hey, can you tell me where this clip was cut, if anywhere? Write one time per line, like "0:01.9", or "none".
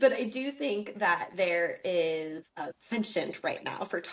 0:02.7

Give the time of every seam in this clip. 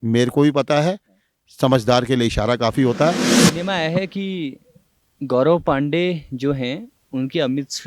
0:03.6

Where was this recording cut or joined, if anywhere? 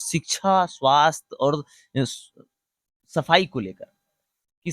none

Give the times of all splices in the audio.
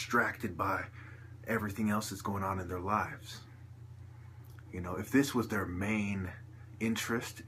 0:02.2

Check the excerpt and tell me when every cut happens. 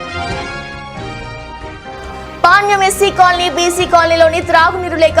0:01.9

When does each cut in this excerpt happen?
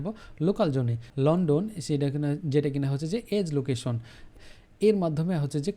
0:01.0
0:04.3

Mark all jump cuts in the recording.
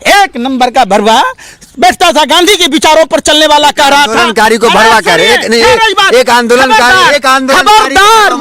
none

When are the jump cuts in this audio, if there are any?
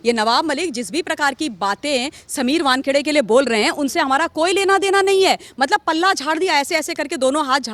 none

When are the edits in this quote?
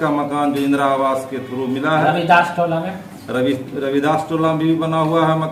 none

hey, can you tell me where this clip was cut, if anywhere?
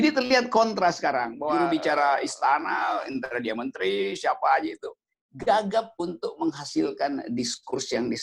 0:01.5

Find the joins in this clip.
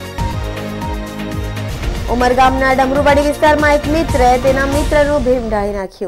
none

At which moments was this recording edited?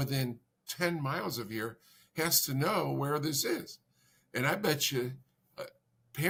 none

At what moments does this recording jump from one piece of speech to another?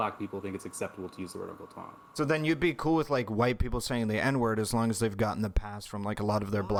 none

